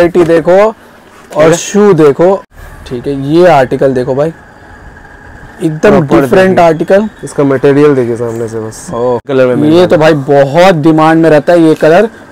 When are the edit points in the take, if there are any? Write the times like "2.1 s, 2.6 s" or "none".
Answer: 2.4 s, 9.3 s

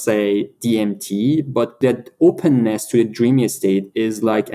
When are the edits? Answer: 1.7 s

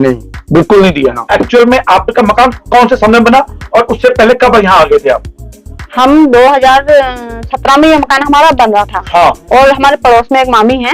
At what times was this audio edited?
1.2 s

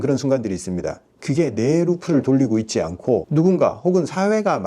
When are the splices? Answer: 3.3 s

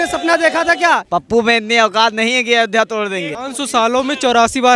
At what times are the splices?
1.0 s, 3.4 s

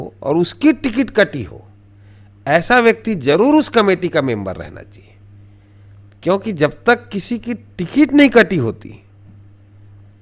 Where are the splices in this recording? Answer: none

